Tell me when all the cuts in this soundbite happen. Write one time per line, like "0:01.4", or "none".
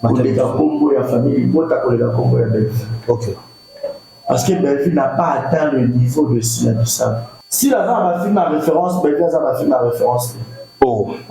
0:07.3